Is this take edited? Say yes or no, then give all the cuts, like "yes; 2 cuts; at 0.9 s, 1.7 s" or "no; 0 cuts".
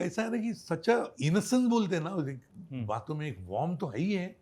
yes; 1 cut; at 1.1 s